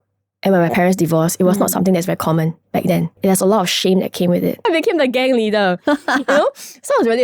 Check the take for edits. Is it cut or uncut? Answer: cut